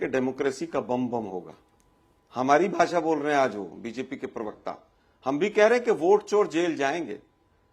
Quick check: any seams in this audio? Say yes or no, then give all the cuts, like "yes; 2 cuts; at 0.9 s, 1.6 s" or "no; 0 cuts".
no; 0 cuts